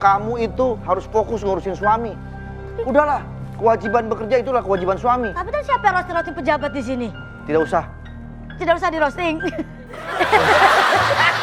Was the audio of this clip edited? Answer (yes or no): no